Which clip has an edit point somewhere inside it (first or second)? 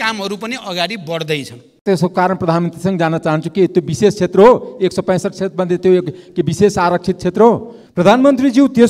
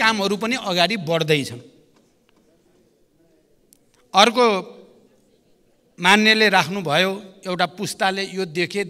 first